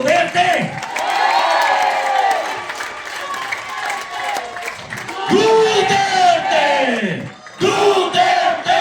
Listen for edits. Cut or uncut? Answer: uncut